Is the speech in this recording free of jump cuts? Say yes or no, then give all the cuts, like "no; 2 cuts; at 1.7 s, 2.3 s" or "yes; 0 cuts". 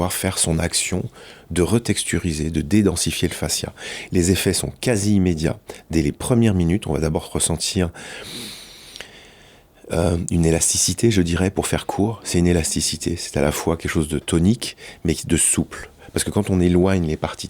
yes; 0 cuts